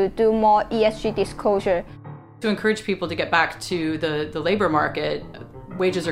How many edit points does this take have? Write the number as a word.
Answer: one